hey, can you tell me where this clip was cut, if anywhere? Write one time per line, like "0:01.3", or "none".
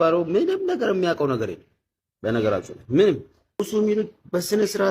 0:03.6